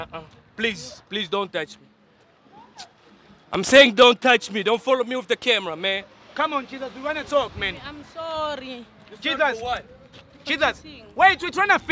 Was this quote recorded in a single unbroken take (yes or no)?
yes